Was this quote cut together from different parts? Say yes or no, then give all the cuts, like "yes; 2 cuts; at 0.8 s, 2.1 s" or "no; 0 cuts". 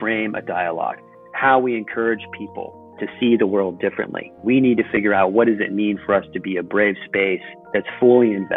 yes; 1 cut; at 7.5 s